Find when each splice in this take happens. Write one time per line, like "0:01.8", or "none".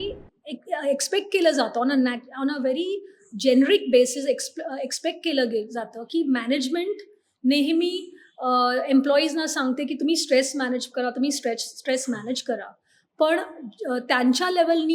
none